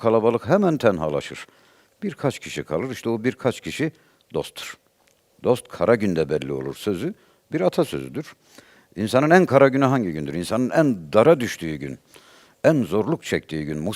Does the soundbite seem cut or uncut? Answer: uncut